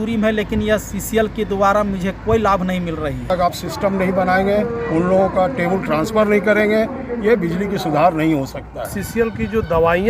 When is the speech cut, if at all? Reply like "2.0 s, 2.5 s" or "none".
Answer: 3.3 s, 9.0 s